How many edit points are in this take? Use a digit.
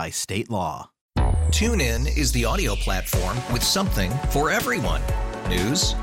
1